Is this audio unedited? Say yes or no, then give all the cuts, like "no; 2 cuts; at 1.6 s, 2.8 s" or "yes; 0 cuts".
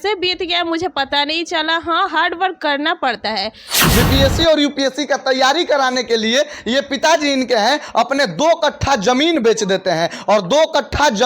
no; 1 cut; at 3.8 s